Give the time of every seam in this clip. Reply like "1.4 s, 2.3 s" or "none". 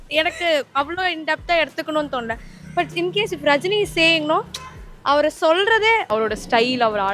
6.0 s

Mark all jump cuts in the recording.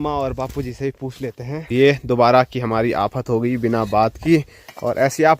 1.7 s

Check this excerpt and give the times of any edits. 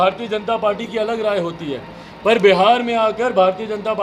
none

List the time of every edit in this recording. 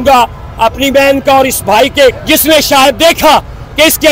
2.2 s

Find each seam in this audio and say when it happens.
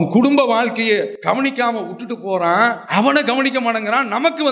1.1 s, 2.8 s

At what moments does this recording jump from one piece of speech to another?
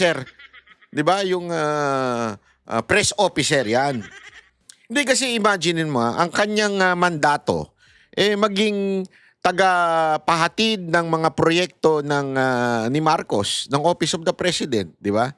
none

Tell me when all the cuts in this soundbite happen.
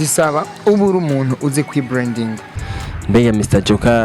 2.6 s

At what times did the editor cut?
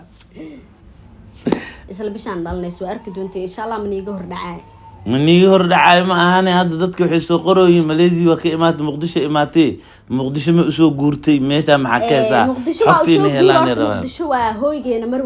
1.8 s

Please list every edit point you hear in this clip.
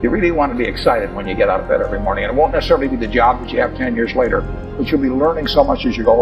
4.9 s

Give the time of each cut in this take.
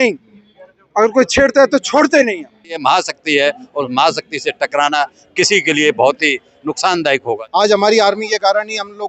2.8 s, 7.4 s

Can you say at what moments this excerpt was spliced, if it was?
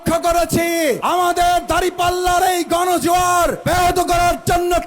1.0 s, 3.6 s

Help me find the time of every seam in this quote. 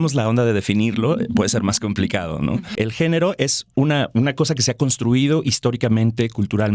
2.8 s

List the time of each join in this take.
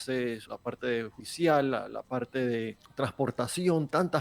1.0 s, 2.8 s

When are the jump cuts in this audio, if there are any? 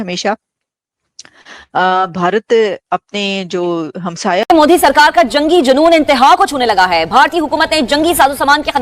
4.4 s

